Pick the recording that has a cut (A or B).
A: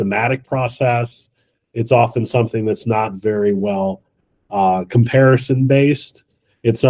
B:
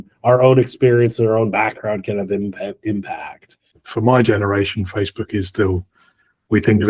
B